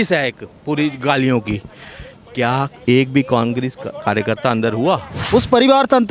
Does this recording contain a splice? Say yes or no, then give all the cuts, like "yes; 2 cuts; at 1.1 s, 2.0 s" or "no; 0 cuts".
yes; 1 cut; at 5.2 s